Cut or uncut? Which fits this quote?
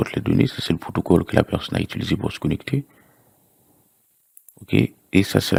uncut